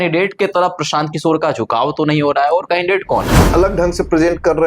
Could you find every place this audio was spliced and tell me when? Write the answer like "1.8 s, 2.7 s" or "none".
3.4 s